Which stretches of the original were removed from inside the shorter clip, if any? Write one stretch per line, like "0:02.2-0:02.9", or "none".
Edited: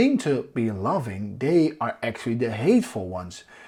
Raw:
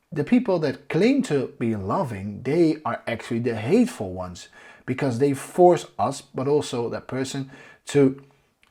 none

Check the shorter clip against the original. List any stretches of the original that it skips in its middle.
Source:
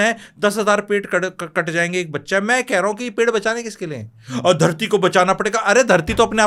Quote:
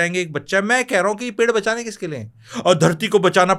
none

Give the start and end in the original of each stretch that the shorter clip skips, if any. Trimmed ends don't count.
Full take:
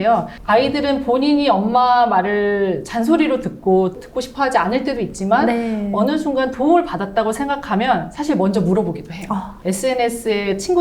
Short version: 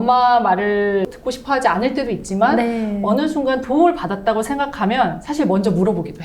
0:02.8-0:04.0

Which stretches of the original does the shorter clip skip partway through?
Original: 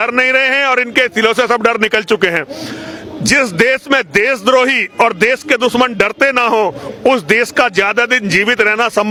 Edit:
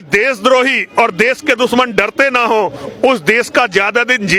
none

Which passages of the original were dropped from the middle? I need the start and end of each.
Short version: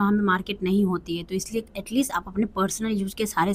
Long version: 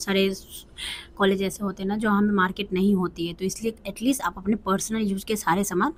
none

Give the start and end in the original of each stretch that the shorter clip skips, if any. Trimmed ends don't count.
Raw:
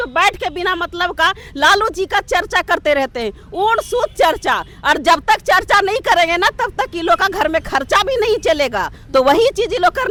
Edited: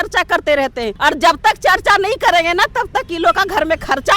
0:03.3-0:04.8

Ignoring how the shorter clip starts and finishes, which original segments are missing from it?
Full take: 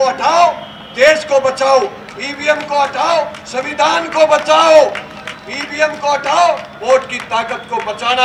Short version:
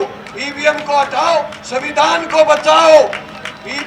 none

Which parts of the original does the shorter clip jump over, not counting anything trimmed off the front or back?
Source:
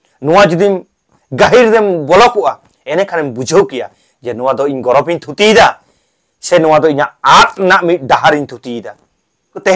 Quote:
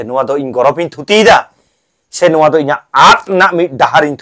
none

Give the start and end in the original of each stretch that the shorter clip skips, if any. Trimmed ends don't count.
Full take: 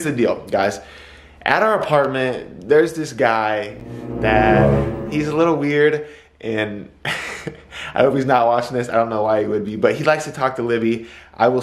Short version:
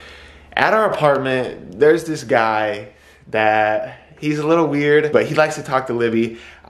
0:06.0-0:09.8

